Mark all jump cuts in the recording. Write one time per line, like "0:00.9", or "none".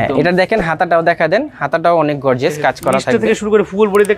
none